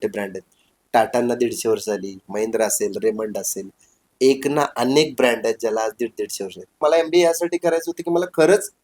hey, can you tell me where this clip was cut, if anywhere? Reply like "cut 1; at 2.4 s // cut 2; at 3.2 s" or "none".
cut 1; at 6.8 s